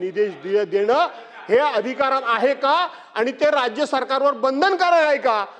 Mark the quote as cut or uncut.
uncut